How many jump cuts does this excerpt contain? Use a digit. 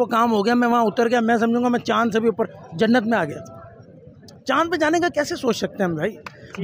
0